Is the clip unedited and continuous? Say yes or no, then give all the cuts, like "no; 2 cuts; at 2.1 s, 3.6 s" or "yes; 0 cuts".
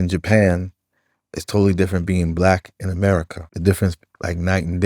no; 1 cut; at 3.4 s